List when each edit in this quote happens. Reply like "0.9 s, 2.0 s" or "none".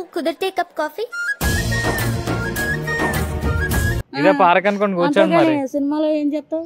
none